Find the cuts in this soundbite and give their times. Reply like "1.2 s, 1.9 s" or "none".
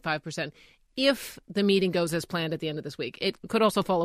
none